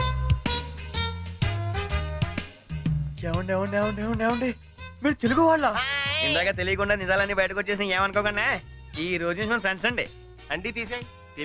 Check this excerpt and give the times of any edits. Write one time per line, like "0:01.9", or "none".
none